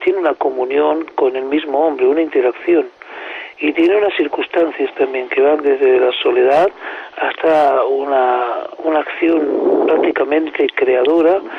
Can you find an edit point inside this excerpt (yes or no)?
no